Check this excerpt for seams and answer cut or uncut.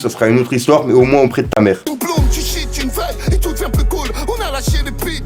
cut